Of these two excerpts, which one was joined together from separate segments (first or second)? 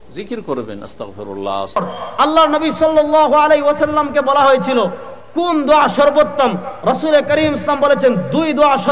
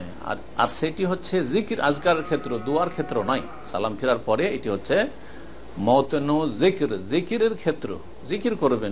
first